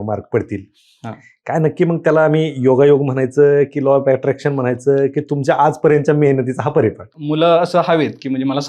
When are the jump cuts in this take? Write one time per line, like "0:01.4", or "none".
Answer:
0:07.1